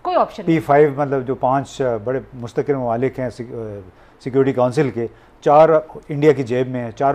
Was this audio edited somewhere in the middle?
no; 0 cuts

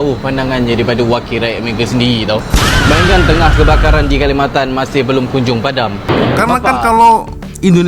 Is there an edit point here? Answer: yes; 1 cut; at 6.1 s

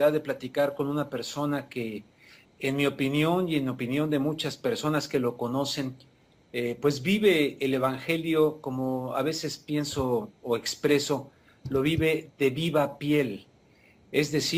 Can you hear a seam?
no; 0 cuts

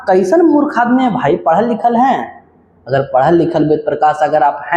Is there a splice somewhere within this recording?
no; 0 cuts

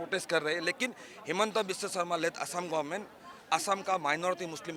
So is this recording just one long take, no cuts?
yes; 0 cuts

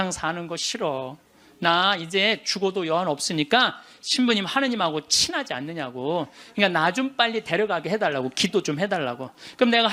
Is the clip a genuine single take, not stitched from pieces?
yes; 0 cuts

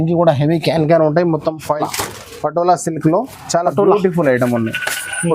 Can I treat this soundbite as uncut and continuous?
no; 1 cut; at 1.7 s

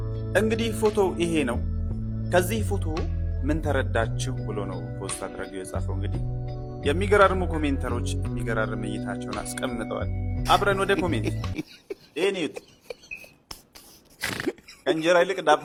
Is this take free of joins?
yes; 0 cuts

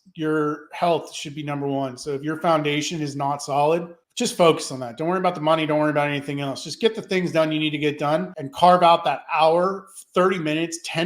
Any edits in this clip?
yes; 2 cuts; at 4.0 s, 8.4 s

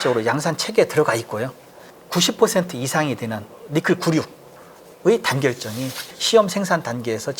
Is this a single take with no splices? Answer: yes; 0 cuts

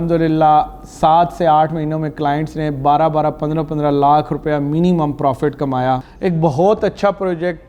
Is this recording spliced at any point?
yes; 1 cut; at 6.1 s

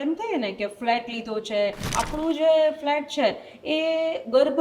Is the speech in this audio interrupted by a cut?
yes; 1 cut; at 1.9 s

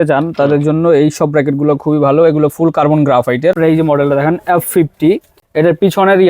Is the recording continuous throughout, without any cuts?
no; 2 cuts; at 3.6 s, 5.3 s

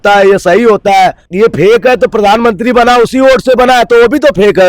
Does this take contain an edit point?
yes; 1 cut; at 1.2 s

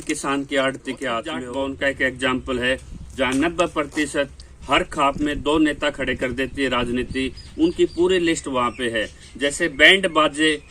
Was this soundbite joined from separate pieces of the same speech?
yes; 1 cut; at 1.4 s

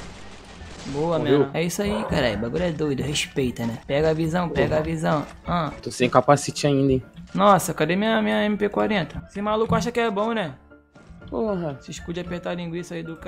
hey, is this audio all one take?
no; 2 cuts; at 1.5 s, 5.8 s

